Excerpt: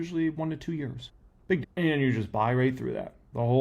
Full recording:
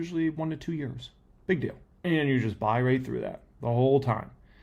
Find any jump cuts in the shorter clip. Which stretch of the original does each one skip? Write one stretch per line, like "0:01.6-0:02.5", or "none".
0:01.4-0:01.7